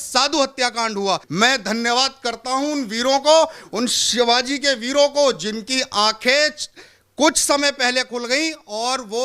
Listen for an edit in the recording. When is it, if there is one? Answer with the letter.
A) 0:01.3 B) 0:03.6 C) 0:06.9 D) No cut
A